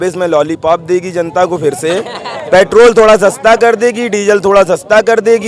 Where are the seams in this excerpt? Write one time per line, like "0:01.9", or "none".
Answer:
none